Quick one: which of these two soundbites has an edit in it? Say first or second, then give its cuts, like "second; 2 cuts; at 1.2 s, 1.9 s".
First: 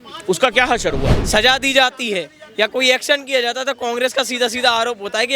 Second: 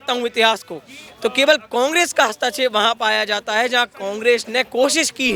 first; 1 cut; at 1.2 s